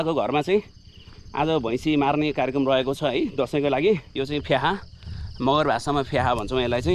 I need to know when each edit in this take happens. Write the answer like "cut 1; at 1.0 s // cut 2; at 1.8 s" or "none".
cut 1; at 4.1 s